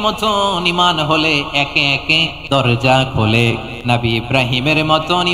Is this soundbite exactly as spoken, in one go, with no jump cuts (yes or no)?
no